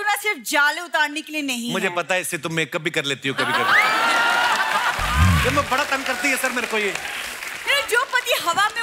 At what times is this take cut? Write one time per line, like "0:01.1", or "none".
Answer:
none